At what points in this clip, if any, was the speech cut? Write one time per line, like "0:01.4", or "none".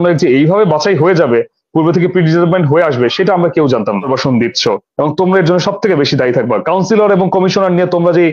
0:04.0